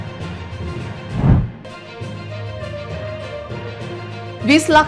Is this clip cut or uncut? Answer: cut